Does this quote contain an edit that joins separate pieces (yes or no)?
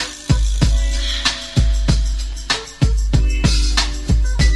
no